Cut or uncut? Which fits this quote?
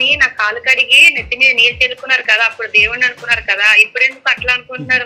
uncut